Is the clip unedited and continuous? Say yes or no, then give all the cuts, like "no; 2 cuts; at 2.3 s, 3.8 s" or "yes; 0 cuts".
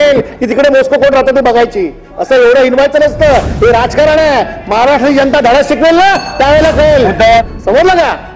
no; 1 cut; at 7.4 s